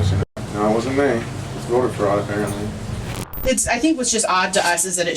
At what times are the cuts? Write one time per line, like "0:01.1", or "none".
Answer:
0:03.2